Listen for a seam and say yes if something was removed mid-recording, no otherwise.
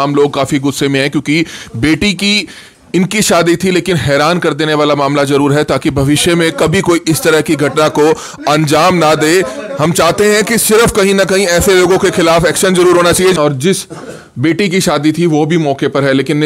yes